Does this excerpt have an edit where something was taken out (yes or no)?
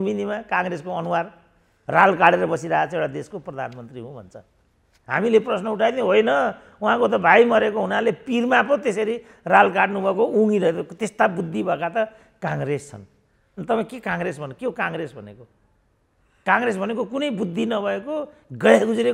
no